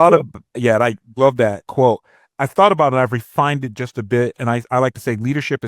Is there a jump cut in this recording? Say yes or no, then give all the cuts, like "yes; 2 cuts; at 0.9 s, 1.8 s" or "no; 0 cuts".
yes; 1 cut; at 1.7 s